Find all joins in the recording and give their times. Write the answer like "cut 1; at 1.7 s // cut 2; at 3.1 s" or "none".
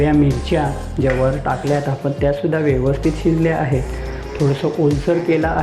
none

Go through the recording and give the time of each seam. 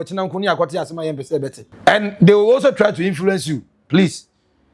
cut 1; at 1.6 s

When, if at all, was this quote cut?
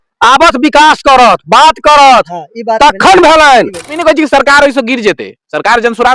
cut 1; at 3.9 s

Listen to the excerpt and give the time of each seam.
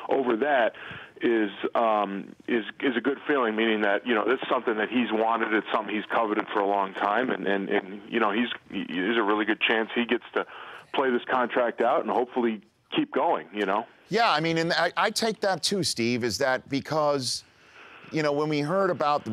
cut 1; at 1.3 s

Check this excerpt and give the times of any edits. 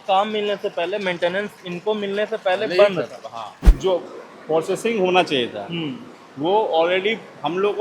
cut 1; at 3.6 s

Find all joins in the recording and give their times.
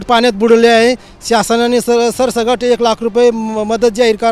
none

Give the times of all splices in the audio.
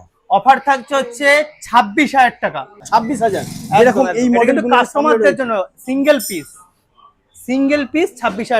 cut 1; at 2.8 s

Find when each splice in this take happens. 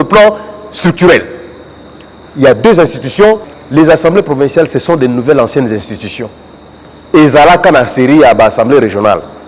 cut 1; at 3.5 s

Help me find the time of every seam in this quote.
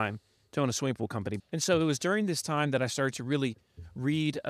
cut 1; at 1.4 s

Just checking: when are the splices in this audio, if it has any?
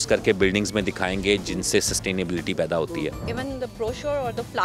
cut 1; at 3.3 s

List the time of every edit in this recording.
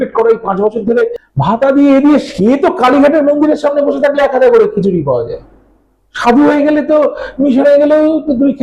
cut 1; at 1.2 s

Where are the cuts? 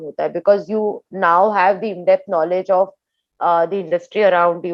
none

